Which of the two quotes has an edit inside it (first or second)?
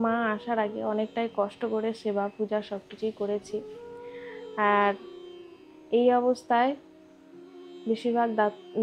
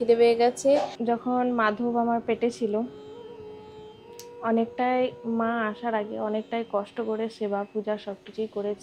second